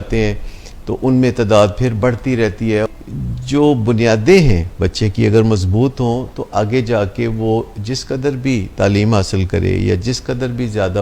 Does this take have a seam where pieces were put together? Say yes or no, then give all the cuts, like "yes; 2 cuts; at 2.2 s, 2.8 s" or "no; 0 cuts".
yes; 1 cut; at 2.9 s